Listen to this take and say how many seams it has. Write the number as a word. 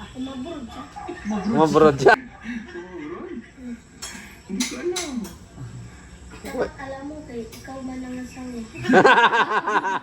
one